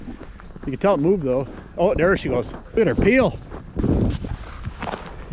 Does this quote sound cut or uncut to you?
cut